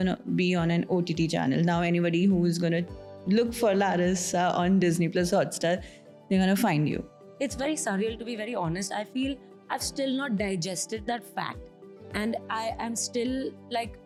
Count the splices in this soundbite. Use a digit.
0